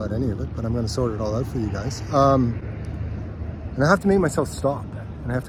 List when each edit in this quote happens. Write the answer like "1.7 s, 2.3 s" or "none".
none